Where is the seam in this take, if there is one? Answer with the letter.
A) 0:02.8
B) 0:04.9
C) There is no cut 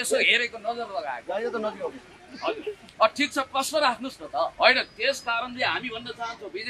C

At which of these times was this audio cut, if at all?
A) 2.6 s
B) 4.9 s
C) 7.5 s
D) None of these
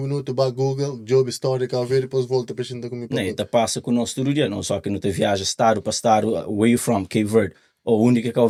D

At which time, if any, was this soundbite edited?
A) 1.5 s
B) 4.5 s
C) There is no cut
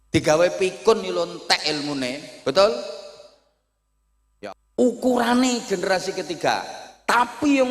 B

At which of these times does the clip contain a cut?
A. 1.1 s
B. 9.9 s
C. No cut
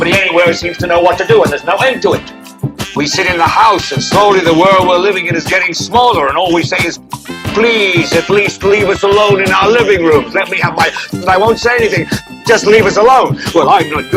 C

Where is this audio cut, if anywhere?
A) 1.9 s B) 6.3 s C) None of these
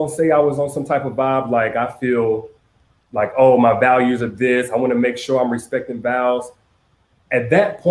A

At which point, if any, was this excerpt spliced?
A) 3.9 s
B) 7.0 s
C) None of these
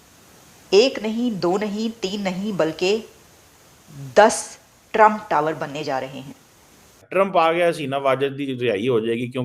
B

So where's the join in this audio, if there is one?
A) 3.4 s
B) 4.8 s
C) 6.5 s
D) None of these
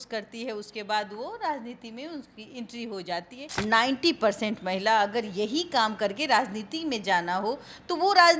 A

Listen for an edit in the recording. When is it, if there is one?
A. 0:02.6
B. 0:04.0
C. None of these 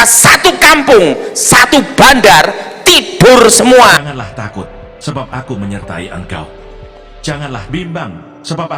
B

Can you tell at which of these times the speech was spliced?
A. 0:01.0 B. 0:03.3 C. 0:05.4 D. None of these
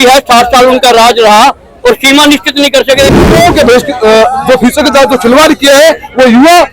B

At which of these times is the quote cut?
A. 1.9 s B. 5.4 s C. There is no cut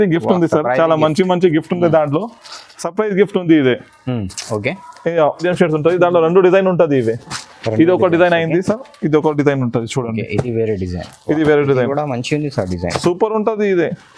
B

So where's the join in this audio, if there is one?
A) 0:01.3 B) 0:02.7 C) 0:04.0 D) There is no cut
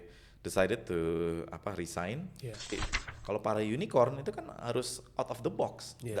B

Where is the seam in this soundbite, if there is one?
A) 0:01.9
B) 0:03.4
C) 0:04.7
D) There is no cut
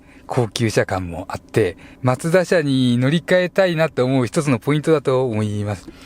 A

